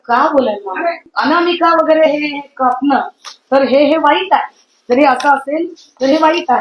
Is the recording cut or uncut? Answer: cut